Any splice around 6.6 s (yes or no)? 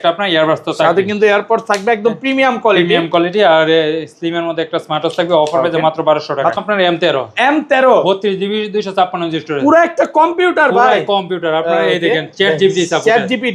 yes